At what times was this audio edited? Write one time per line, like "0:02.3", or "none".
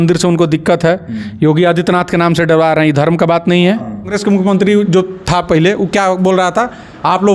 0:04.0